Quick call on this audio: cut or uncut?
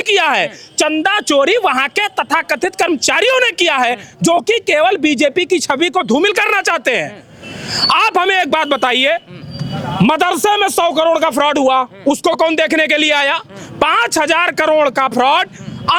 uncut